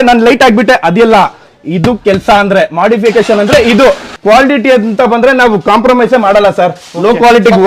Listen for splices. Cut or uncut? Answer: cut